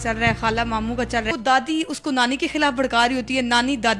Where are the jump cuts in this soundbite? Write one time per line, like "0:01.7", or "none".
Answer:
0:01.3